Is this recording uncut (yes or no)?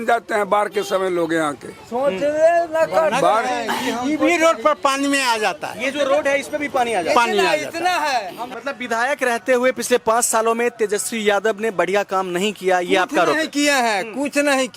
no